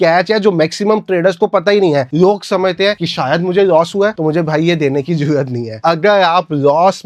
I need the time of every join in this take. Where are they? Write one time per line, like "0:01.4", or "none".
none